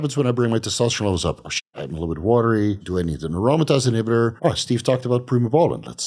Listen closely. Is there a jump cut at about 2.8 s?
yes; 2 cuts; at 2.8 s, 4.4 s

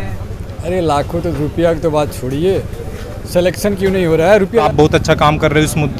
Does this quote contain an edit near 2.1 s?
no; 1 cut; at 4.6 s

